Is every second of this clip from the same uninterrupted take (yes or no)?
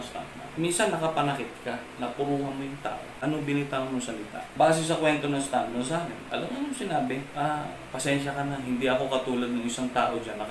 no